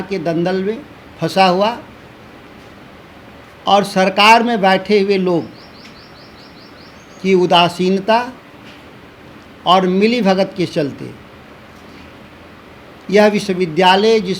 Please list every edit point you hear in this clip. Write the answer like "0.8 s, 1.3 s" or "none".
none